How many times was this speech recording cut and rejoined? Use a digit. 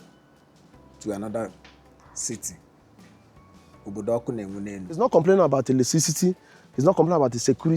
1